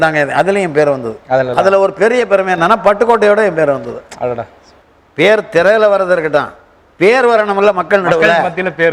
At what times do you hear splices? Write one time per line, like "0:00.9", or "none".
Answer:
none